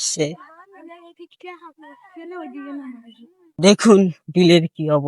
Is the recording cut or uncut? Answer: cut